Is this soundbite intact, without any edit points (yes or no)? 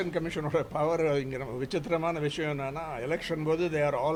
yes